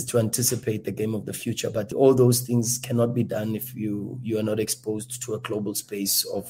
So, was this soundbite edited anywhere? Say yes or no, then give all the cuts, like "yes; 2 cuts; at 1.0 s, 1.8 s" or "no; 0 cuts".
no; 0 cuts